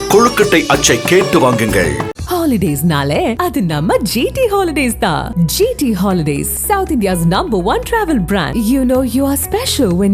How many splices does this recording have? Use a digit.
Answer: 0